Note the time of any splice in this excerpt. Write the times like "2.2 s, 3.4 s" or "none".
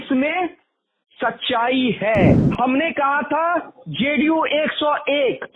2.5 s